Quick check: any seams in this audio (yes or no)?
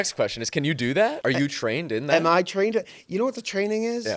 yes